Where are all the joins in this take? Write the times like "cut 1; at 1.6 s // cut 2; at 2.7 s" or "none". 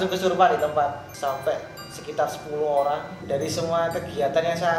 cut 1; at 1.1 s // cut 2; at 3.2 s